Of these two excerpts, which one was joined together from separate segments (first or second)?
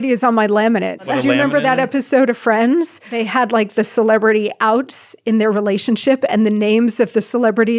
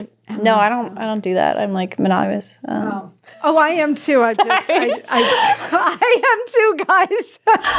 first